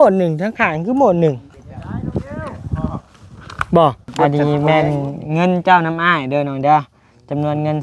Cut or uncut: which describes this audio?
cut